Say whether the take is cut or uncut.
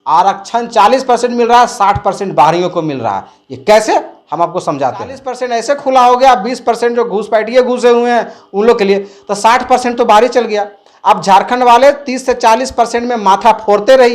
cut